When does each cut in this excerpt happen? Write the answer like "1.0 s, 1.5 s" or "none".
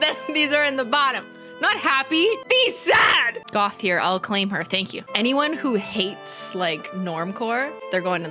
none